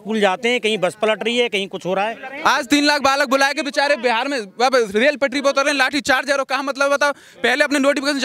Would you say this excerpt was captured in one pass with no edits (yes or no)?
no